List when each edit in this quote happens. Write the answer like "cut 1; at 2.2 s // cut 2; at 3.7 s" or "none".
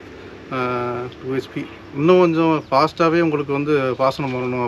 none